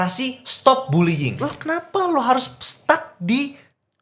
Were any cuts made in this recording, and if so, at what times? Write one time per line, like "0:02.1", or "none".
0:01.4